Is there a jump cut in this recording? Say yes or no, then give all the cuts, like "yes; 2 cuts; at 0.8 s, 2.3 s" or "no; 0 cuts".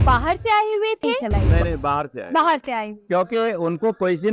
yes; 1 cut; at 1.2 s